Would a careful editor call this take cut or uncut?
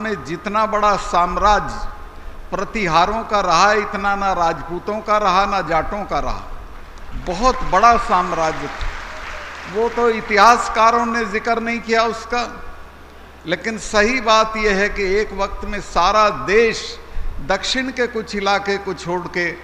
uncut